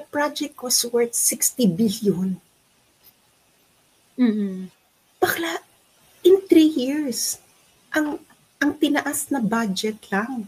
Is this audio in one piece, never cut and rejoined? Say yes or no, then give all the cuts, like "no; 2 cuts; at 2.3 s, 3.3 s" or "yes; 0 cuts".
yes; 0 cuts